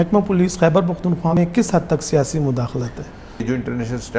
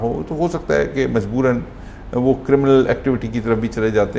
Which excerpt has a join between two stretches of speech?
first; 2 cuts; at 1.4 s, 3.4 s

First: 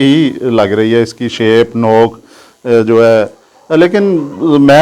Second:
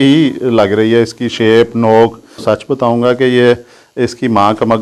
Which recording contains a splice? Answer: second; 1 cut; at 2.4 s

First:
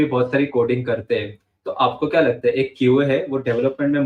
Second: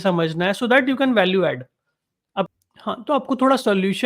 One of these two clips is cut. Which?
second; 1 cut; at 2.5 s

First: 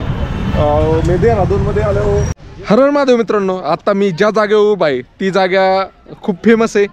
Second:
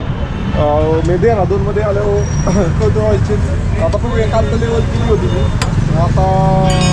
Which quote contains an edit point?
first; 1 cut; at 2.3 s

